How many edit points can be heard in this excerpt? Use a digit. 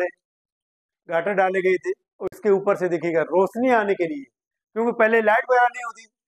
0